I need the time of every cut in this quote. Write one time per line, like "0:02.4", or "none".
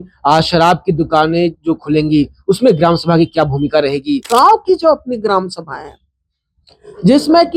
0:04.2